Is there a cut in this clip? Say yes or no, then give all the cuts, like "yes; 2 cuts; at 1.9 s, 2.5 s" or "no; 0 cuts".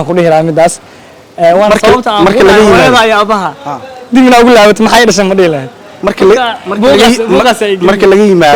no; 0 cuts